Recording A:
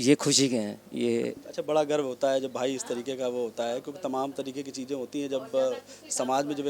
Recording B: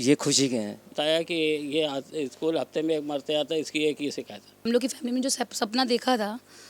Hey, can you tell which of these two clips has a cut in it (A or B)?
B